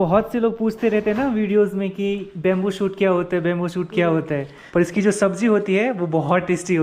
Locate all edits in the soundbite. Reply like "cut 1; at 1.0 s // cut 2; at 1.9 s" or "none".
cut 1; at 4.5 s